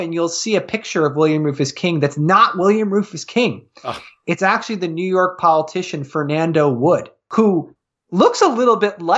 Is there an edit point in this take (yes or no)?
yes